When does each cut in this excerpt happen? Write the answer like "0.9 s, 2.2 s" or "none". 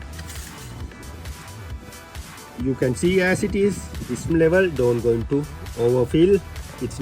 4.3 s